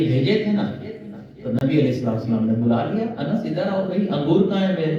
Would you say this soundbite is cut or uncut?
uncut